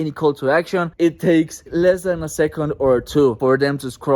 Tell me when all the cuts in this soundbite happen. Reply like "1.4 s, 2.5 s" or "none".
0.9 s, 1.7 s, 3.4 s